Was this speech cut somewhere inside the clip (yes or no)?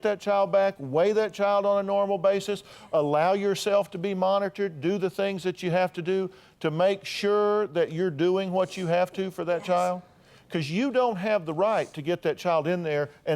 no